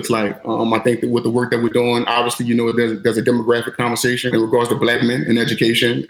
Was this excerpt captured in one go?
no; 1 cut; at 4.3 s

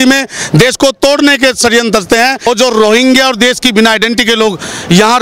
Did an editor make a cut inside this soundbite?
yes; 1 cut; at 2.5 s

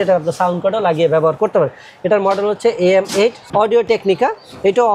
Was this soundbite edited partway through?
yes; 1 cut; at 3.4 s

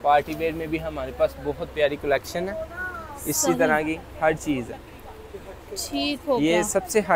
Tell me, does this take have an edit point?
no; 0 cuts

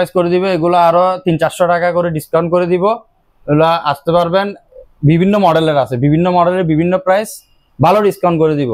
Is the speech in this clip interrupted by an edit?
no; 0 cuts

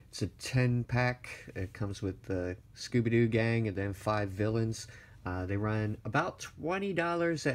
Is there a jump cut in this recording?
yes; 1 cut; at 2.3 s

